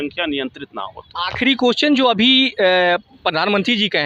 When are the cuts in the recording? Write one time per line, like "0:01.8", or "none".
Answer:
none